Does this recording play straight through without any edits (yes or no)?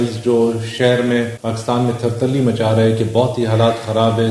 no